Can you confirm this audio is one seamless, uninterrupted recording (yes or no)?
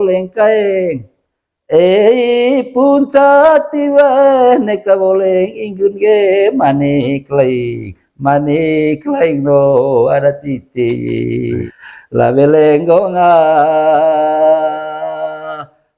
no